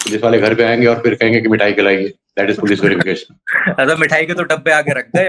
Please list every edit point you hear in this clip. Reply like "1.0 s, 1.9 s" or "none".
none